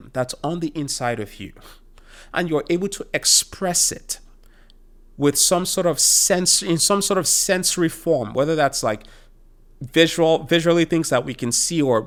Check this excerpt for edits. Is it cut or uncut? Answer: uncut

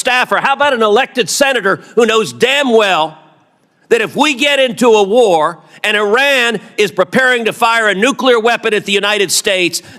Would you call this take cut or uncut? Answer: uncut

